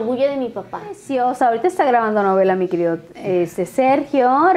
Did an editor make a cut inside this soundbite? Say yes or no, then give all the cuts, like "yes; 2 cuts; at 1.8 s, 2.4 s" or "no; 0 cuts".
yes; 1 cut; at 1.0 s